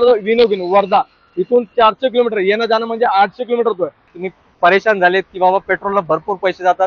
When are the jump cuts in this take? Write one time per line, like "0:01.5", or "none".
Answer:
0:04.1